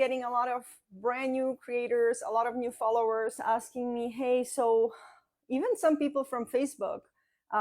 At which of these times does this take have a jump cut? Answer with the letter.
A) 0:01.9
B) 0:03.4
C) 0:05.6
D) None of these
B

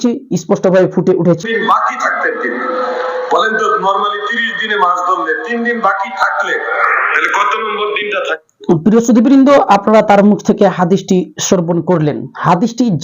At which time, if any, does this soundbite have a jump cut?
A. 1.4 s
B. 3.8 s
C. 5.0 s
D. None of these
A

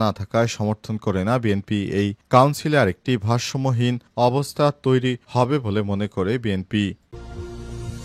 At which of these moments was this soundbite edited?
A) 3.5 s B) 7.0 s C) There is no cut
B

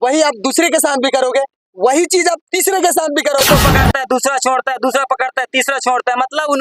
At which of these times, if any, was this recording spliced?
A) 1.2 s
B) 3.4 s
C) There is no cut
B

